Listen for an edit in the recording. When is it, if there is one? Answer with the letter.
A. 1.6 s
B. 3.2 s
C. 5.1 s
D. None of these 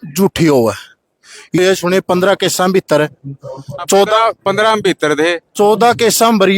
A